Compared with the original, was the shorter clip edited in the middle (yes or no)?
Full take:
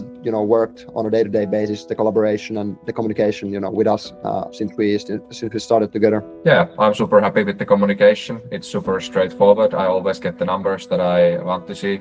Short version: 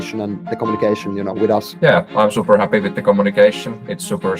yes